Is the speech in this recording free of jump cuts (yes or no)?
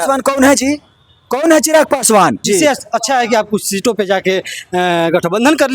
no